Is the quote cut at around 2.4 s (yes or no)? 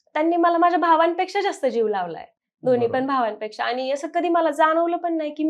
no